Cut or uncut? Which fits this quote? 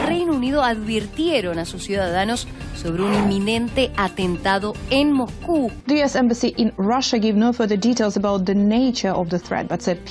cut